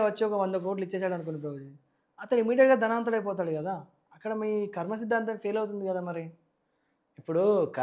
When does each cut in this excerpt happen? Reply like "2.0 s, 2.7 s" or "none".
none

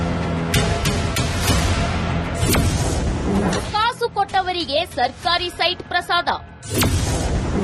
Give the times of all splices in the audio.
0.9 s

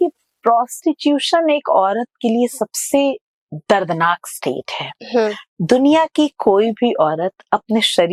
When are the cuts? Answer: none

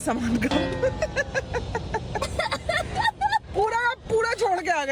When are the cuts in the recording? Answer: 2.2 s

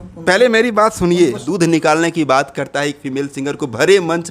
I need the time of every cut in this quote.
1.4 s

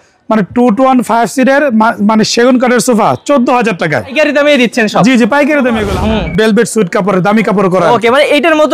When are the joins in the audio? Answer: 4.1 s, 5.9 s

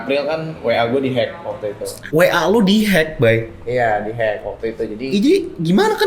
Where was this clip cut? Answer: none

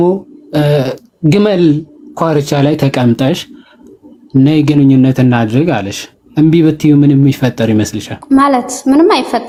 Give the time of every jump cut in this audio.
none

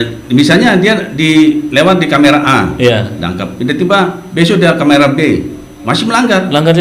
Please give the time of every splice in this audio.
none

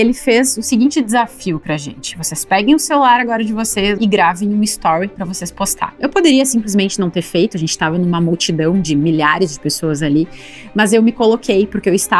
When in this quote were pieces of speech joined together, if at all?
4.0 s, 6.0 s

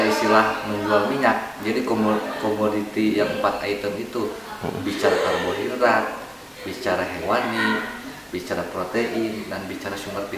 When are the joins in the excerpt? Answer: none

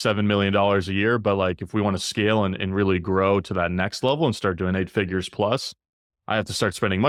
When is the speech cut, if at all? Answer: none

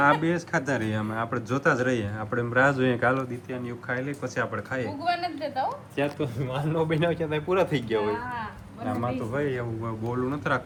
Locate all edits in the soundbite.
none

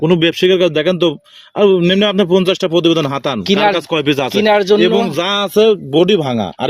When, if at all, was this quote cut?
none

